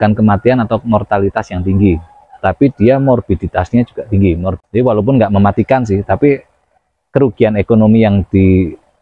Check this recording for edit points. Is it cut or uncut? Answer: cut